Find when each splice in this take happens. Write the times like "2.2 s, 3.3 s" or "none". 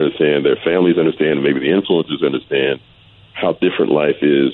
none